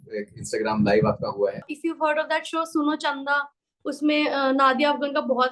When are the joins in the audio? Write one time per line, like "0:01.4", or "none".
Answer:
0:01.6